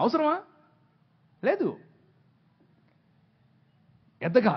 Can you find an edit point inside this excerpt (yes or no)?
no